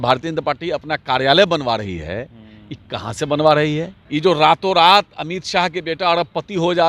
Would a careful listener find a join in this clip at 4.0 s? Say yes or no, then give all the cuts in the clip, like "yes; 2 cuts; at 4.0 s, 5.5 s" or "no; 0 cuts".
yes; 1 cut; at 4.0 s